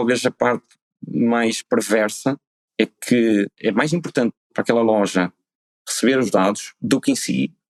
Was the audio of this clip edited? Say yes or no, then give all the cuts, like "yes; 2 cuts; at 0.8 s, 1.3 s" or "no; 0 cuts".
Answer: no; 0 cuts